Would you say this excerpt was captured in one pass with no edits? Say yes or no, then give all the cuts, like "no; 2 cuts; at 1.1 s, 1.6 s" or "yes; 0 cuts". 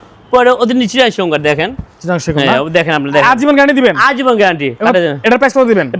yes; 0 cuts